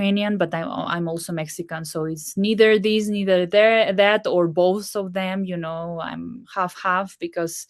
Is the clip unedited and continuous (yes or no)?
yes